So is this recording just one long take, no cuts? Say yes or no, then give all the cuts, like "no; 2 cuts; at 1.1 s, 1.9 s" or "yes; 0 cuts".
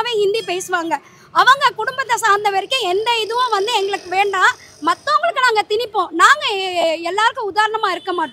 yes; 0 cuts